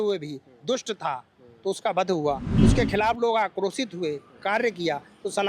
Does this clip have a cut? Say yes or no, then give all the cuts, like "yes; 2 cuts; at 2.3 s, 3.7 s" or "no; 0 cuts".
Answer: yes; 1 cut; at 2.5 s